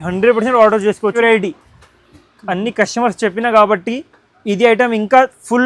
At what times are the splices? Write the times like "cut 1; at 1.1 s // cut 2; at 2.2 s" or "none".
cut 1; at 1.1 s